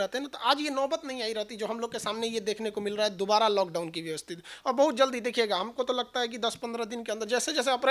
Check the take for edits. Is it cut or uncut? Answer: uncut